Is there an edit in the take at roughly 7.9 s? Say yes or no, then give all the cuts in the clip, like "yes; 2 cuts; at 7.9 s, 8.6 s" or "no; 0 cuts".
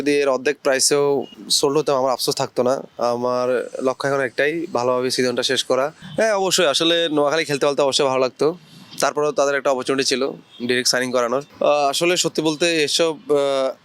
no; 3 cuts; at 1.4 s, 6.0 s, 11.5 s